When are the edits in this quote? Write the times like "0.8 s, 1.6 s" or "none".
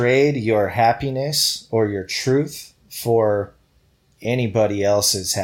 none